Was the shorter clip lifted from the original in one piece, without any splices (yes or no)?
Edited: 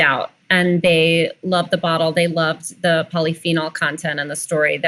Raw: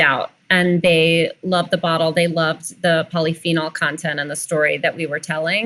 yes